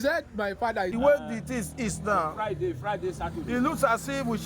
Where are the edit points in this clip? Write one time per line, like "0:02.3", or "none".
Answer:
0:00.9